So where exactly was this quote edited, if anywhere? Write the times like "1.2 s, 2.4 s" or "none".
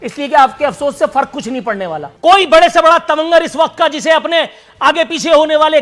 2.0 s